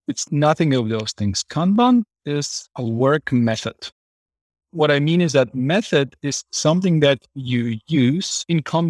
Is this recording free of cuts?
no; 1 cut; at 4.2 s

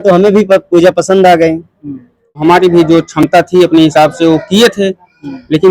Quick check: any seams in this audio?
yes; 1 cut; at 2.4 s

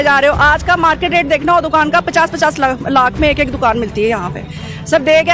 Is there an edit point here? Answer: no; 0 cuts

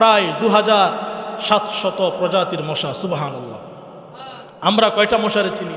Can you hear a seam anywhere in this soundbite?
no; 0 cuts

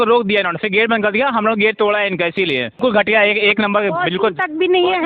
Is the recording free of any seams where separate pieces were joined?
no; 1 cut; at 2.8 s

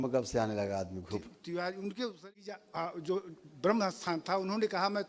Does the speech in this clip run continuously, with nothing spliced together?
no; 1 cut; at 2.5 s

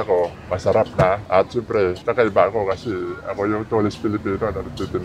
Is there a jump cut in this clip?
no; 0 cuts

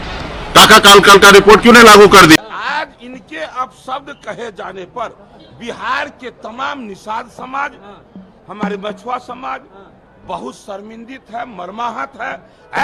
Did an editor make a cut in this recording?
no; 0 cuts

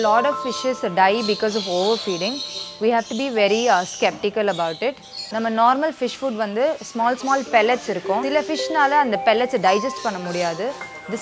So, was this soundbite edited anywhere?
yes; 2 cuts; at 5.2 s, 8.3 s

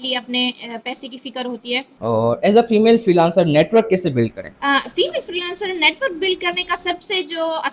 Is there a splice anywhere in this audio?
yes; 2 cuts; at 1.8 s, 4.5 s

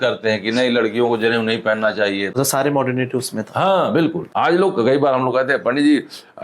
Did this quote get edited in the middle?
yes; 1 cut; at 2.3 s

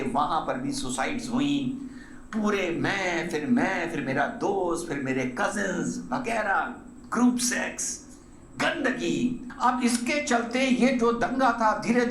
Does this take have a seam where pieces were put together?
yes; 1 cut; at 9.5 s

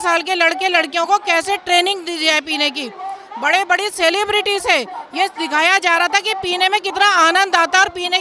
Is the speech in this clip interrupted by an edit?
no; 0 cuts

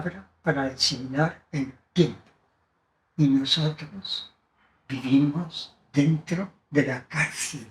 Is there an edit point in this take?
no; 0 cuts

